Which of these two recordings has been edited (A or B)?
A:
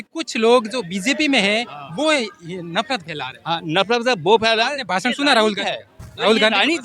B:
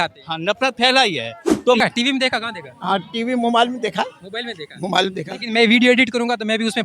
B